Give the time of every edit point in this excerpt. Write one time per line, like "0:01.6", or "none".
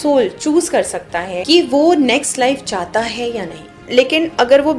0:01.3
0:03.8

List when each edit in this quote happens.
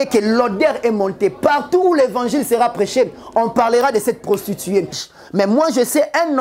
0:05.0

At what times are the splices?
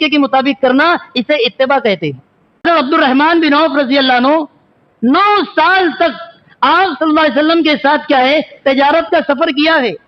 0:02.6

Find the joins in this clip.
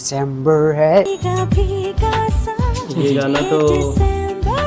0:01.1

